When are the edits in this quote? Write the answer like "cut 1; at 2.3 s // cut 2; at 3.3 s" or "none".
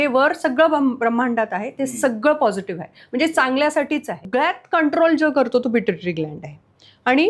cut 1; at 4.3 s